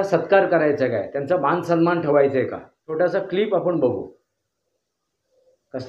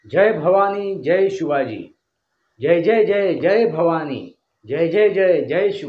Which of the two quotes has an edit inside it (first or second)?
first